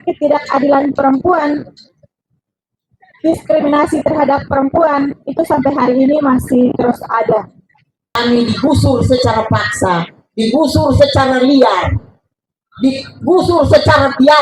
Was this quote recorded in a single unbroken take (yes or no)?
no